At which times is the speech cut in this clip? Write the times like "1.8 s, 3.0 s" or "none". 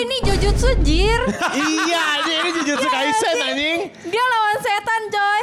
none